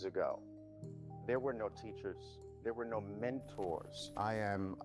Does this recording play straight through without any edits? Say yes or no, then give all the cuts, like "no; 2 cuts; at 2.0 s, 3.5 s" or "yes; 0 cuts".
yes; 0 cuts